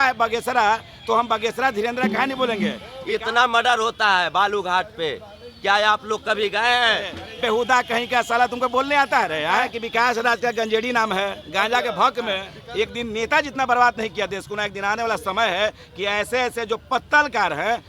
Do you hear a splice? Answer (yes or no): yes